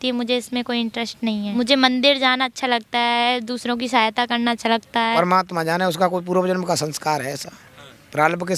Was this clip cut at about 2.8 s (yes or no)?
no